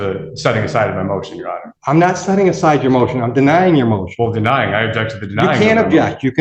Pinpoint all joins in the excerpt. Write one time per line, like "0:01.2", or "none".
0:01.7